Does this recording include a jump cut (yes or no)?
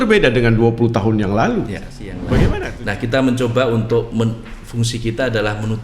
yes